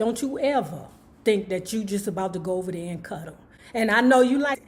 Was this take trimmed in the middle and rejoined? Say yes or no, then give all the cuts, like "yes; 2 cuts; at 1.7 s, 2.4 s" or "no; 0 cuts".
no; 0 cuts